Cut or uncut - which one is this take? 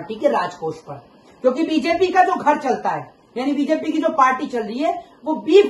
uncut